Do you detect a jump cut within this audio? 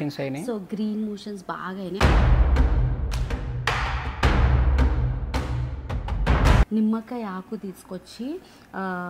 yes; 1 cut; at 6.7 s

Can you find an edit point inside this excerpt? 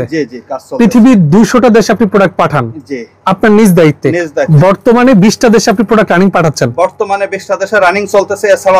yes; 1 cut; at 4.5 s

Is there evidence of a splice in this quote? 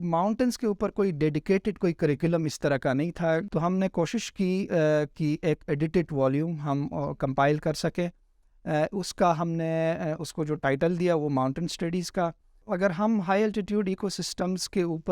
yes; 2 cuts; at 3.5 s, 12.5 s

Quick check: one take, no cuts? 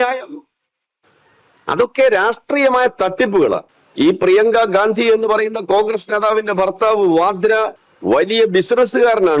no; 2 cuts; at 3.8 s, 7.9 s

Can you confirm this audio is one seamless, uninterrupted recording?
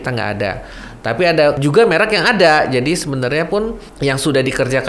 no; 2 cuts; at 1.6 s, 3.8 s

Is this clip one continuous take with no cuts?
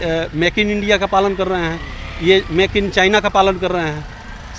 yes; 0 cuts

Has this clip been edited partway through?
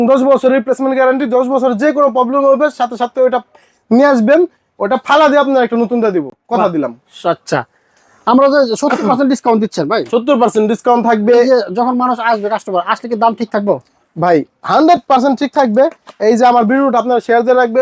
no; 0 cuts

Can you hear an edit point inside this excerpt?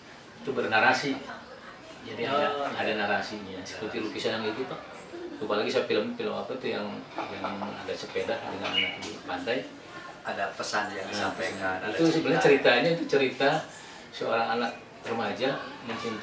no; 0 cuts

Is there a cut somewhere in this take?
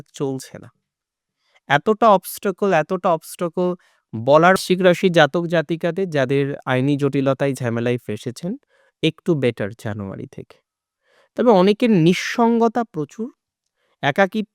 yes; 1 cut; at 4.6 s

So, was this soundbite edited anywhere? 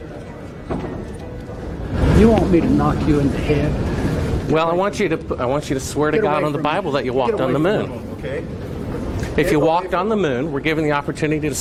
no; 0 cuts

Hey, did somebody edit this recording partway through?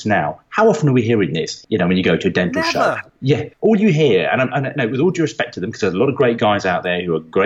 yes; 2 cuts; at 1.6 s, 3.0 s

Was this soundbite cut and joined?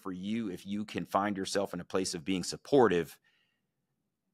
no; 0 cuts

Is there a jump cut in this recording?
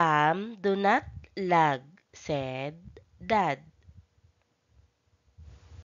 yes; 1 cut; at 5.0 s

